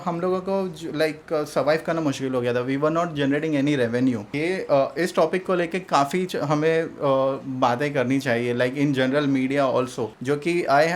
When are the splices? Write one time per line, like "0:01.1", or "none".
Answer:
0:04.3
0:10.1